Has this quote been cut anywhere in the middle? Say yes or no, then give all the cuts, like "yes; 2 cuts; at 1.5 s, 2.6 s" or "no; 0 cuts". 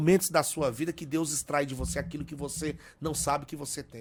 no; 0 cuts